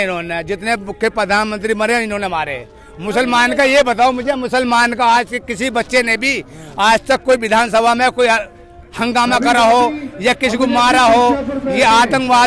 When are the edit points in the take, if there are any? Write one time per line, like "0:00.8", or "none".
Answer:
none